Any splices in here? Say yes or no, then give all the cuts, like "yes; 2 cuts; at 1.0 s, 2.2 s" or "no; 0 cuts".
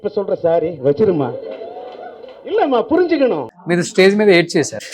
yes; 1 cut; at 3.4 s